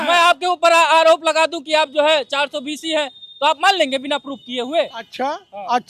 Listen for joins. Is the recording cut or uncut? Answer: uncut